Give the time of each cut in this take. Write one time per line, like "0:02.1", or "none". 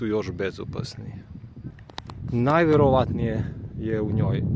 0:01.7